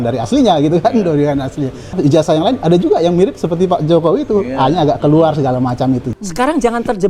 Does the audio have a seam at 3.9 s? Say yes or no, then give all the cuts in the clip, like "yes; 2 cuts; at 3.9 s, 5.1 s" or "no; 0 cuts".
no; 2 cuts; at 1.9 s, 6.1 s